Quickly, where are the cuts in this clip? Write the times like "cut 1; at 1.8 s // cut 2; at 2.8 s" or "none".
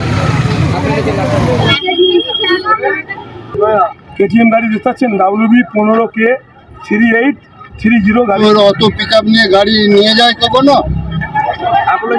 cut 1; at 11.2 s